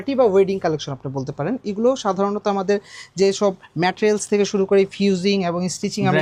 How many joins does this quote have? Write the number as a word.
zero